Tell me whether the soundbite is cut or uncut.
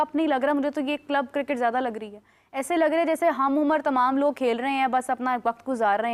uncut